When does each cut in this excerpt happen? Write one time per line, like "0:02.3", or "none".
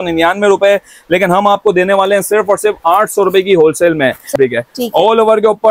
0:04.3